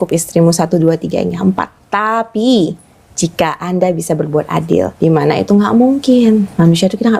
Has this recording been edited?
yes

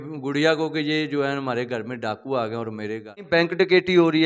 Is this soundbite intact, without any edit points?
no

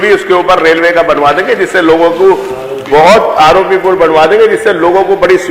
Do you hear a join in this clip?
no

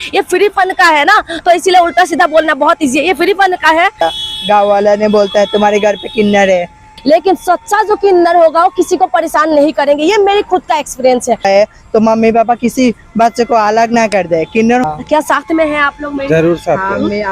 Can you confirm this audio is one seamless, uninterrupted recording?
no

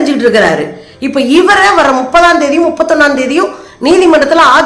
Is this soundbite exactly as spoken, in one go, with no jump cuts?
yes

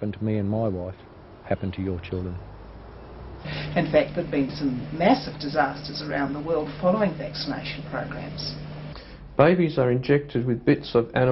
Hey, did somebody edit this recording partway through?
yes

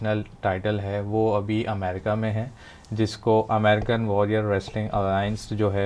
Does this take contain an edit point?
no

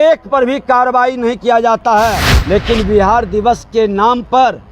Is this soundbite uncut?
no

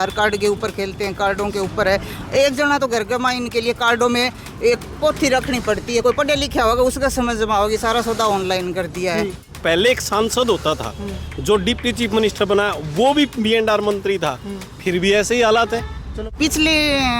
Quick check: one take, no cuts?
no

